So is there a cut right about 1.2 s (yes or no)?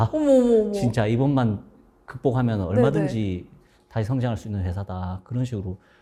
no